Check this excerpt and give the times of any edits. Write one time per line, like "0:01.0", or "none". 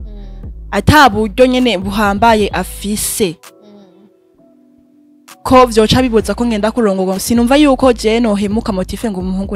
0:07.2